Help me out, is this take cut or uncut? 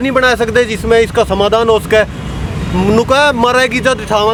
uncut